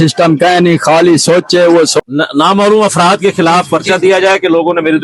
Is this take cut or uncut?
cut